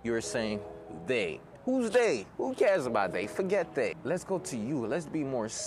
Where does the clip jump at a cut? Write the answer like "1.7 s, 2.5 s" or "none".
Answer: 4.0 s